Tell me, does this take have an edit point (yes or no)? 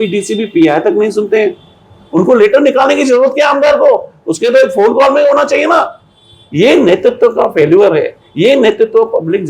no